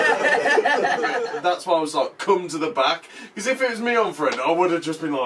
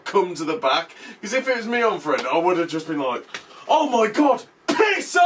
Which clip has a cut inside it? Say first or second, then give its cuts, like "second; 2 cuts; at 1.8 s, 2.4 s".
first; 1 cut; at 1.2 s